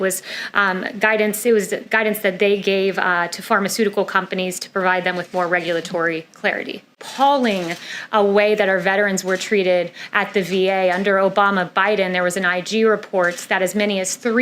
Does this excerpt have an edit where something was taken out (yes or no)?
yes